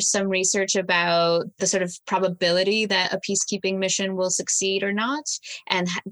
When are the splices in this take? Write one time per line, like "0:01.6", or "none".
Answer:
0:01.5